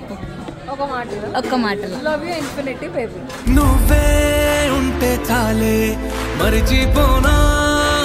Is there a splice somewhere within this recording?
no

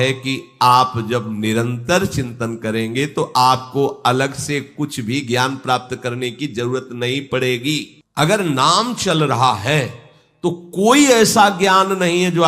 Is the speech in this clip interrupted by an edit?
yes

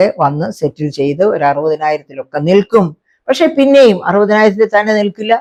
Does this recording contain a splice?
no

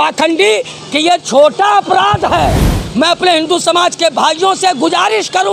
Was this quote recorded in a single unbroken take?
no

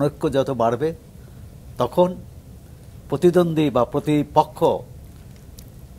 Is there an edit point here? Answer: no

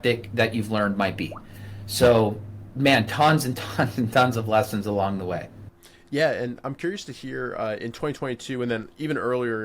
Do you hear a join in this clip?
no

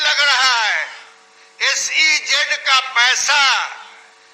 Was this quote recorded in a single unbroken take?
yes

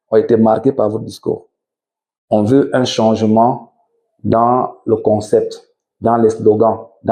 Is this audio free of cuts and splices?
yes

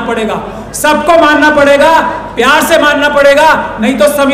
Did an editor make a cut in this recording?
no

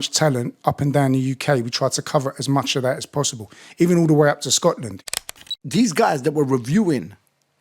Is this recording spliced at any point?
yes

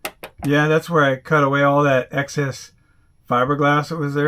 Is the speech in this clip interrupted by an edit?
no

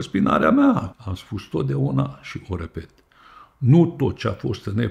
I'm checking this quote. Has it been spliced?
yes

